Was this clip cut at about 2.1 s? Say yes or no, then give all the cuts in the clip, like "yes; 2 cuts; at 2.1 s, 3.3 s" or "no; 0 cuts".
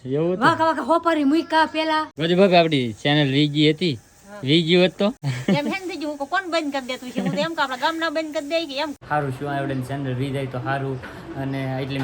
yes; 3 cuts; at 2.1 s, 5.3 s, 9.0 s